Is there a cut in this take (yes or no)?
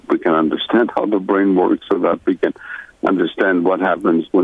no